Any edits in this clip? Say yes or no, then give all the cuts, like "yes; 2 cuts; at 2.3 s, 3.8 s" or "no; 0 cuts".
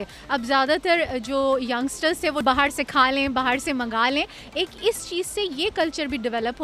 yes; 1 cut; at 2.4 s